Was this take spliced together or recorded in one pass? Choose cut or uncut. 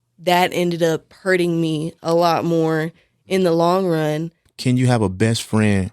cut